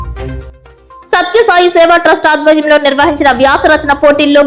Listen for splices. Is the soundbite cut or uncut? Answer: uncut